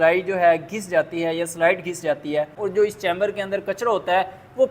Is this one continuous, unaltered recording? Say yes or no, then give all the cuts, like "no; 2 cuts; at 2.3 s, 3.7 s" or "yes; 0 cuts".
no; 1 cut; at 2.6 s